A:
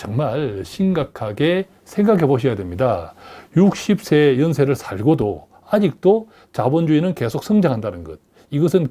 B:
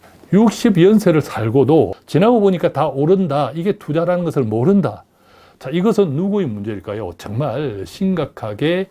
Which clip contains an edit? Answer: B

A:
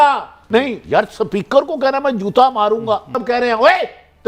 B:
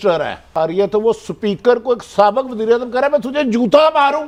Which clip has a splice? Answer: A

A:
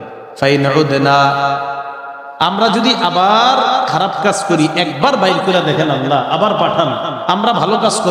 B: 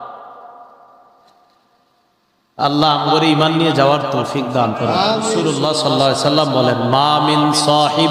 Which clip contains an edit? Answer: B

